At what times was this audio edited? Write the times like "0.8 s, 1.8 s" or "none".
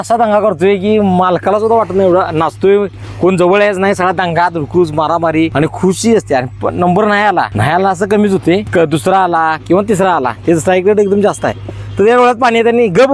5.5 s, 7.5 s, 8.7 s